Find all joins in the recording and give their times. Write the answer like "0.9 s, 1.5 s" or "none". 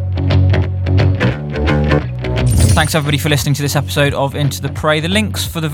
2.7 s

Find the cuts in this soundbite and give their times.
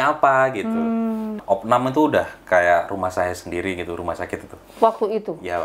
1.4 s

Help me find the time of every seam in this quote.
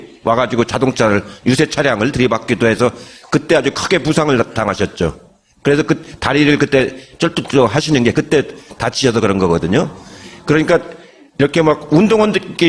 6.2 s

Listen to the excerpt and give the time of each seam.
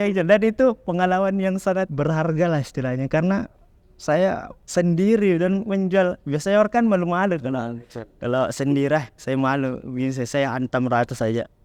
none

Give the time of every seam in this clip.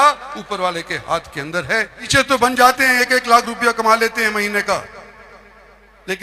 2.1 s

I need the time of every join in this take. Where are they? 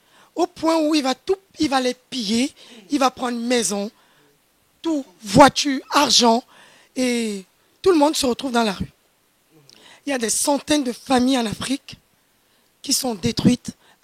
none

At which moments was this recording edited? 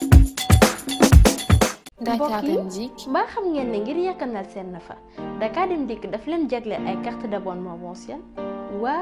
1.9 s

